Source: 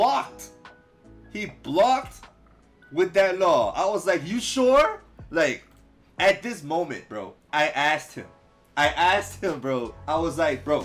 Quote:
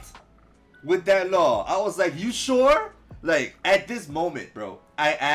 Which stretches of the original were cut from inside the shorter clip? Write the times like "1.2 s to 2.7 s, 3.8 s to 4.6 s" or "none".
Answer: 5.6 s to 6.1 s